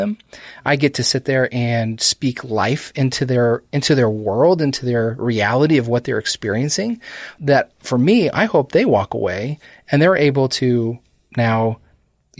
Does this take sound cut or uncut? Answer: cut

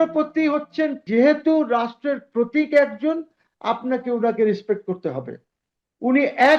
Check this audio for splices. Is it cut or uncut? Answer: cut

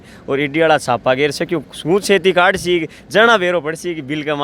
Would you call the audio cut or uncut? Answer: uncut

